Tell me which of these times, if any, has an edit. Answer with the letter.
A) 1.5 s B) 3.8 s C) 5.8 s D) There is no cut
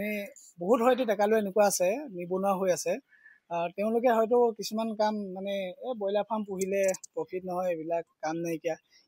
D